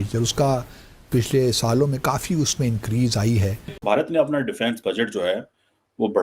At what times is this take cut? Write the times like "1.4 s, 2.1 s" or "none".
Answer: 3.8 s

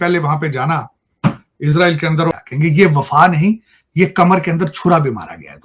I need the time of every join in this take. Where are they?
2.2 s

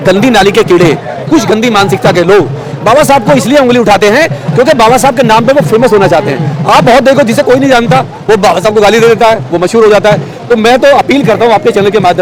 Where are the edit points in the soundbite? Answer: none

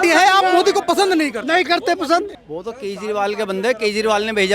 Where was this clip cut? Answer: 2.4 s

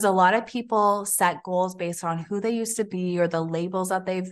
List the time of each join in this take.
none

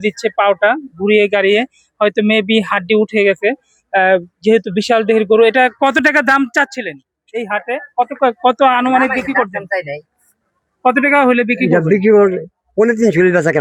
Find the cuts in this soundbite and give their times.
none

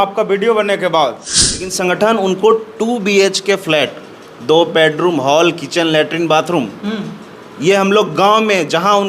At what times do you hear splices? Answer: 1.7 s

